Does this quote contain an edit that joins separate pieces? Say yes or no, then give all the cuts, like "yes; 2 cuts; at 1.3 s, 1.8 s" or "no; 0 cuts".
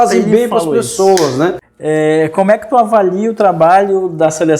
yes; 1 cut; at 1.7 s